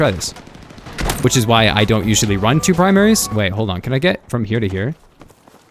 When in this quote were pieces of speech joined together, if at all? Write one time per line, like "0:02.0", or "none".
0:01.2